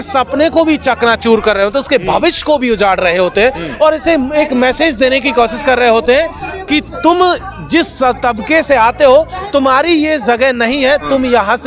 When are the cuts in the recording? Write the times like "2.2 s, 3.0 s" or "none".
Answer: none